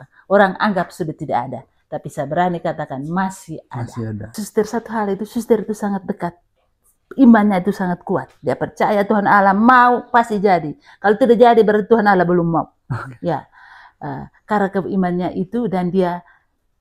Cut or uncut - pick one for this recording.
cut